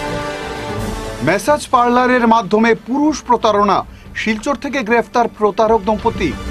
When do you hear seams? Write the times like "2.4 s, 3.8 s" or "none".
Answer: 0.9 s